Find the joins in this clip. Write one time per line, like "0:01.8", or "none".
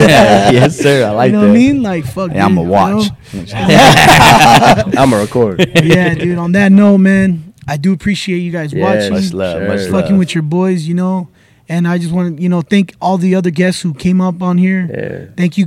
none